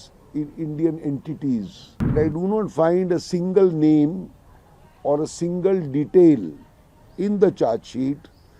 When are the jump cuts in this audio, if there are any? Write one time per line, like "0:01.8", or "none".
0:02.1